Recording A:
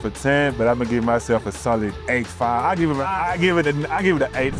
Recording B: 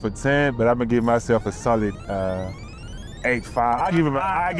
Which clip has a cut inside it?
A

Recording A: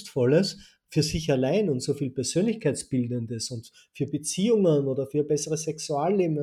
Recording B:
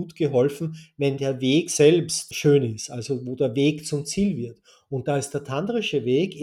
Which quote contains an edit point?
B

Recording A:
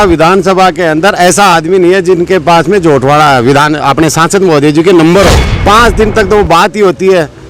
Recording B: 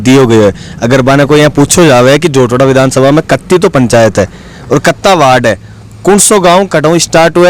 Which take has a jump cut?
A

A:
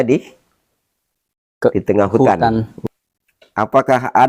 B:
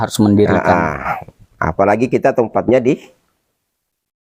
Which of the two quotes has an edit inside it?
A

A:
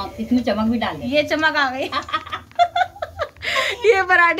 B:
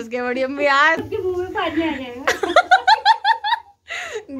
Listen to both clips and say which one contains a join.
B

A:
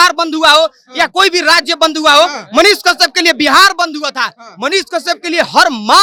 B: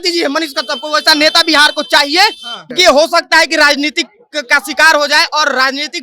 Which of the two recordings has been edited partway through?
B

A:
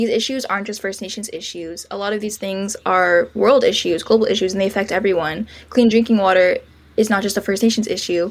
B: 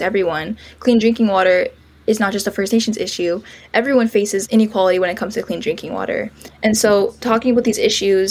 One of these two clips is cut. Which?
B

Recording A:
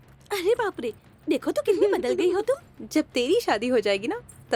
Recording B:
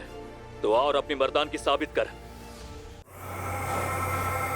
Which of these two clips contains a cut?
B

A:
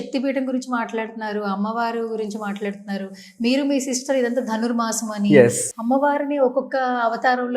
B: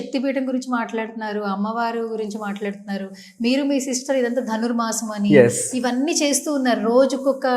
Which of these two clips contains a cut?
A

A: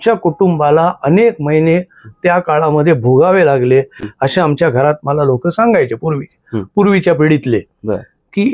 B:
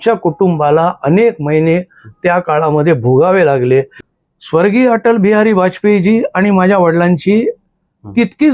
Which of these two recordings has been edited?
B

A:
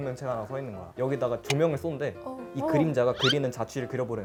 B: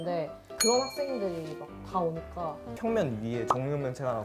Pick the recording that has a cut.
B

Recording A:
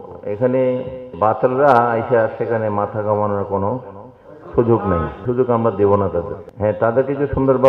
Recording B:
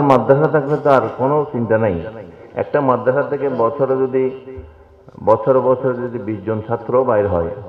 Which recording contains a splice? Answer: A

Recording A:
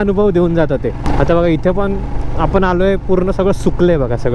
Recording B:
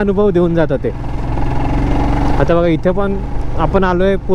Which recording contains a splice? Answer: A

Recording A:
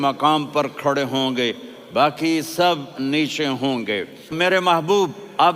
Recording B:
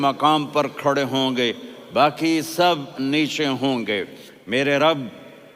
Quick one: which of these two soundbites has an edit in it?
A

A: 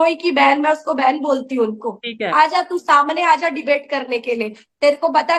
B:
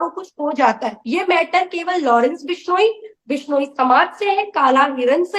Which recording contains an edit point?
B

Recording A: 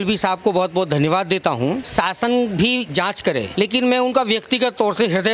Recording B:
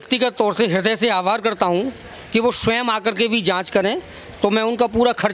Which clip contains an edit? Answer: A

